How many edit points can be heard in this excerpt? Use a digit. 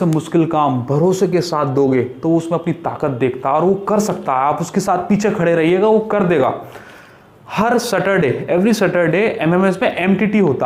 0